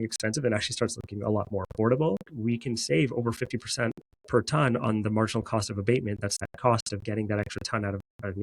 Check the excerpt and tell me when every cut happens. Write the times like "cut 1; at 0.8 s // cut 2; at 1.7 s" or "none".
cut 1; at 2.3 s // cut 2; at 6.4 s